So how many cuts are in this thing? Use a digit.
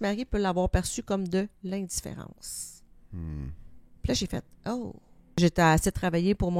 1